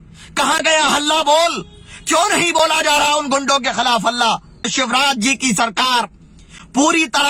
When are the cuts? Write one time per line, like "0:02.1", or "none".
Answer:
0:04.6